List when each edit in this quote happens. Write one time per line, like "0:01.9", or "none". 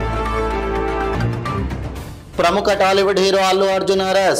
0:01.1